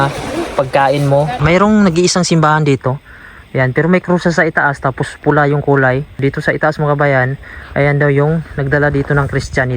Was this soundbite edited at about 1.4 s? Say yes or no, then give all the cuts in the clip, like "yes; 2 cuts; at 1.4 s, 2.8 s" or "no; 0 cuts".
yes; 2 cuts; at 1.4 s, 6.2 s